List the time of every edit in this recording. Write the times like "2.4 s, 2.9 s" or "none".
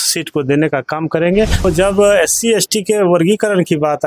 1.6 s